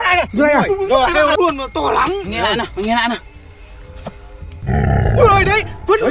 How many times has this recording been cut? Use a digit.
1